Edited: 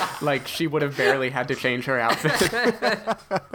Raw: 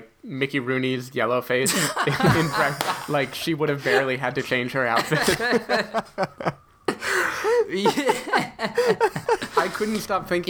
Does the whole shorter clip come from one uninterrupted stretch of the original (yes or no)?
yes